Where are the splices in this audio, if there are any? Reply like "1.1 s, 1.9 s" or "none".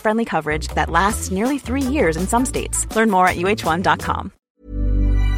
4.4 s